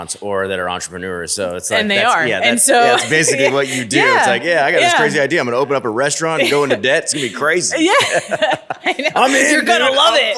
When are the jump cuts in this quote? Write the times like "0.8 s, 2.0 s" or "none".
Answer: none

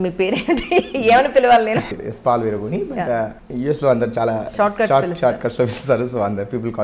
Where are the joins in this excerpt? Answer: 1.9 s, 3.4 s

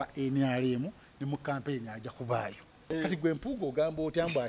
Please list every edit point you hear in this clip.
2.8 s

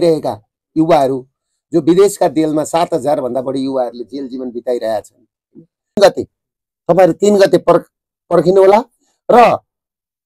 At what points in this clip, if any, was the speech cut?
6.0 s

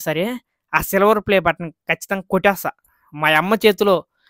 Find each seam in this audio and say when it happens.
none

